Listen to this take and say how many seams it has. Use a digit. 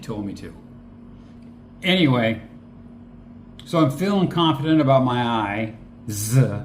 1